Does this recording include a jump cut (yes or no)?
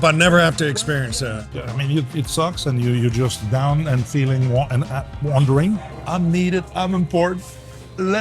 yes